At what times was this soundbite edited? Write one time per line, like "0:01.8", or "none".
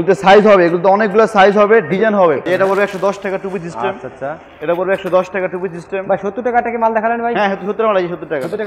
0:02.4